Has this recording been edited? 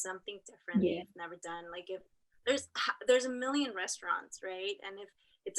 no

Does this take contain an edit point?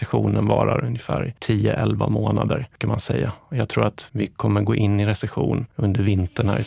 no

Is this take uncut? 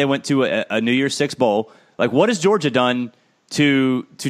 yes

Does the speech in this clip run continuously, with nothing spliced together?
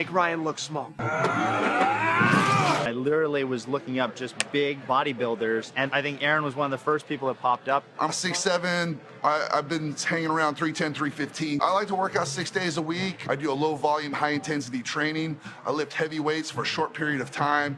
no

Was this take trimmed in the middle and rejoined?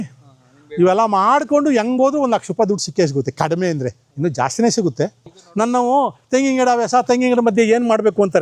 yes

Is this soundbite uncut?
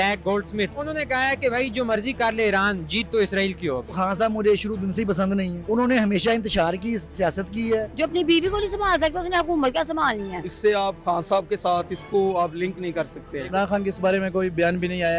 no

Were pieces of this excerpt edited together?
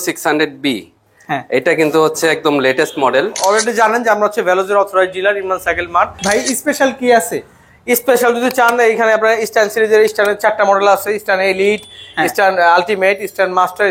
yes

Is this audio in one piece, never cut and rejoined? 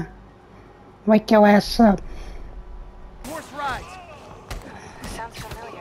no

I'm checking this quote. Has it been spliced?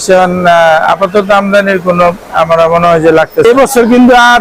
yes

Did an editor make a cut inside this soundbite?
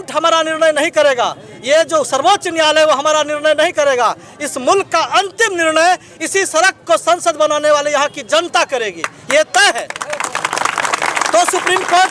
no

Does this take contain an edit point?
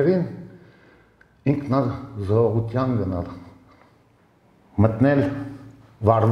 no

